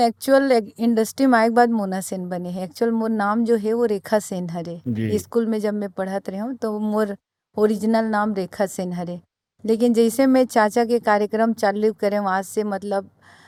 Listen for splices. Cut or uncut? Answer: uncut